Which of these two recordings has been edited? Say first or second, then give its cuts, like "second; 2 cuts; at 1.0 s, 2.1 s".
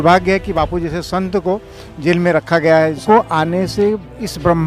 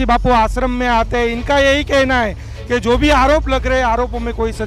first; 1 cut; at 3.0 s